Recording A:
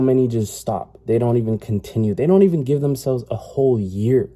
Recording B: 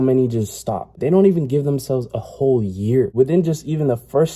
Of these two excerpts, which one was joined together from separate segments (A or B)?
B